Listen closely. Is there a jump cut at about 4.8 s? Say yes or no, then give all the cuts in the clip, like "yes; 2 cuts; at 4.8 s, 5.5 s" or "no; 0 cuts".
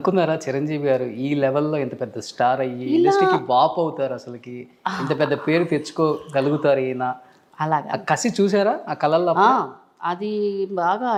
no; 0 cuts